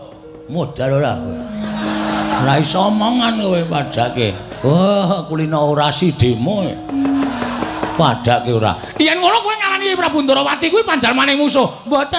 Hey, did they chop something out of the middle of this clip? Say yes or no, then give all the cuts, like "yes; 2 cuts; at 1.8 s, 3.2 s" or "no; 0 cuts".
no; 0 cuts